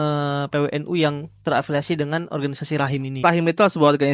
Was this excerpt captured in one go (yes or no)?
no